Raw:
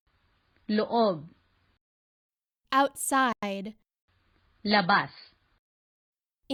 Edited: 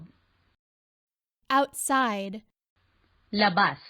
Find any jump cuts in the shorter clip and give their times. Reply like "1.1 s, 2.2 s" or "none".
2.1 s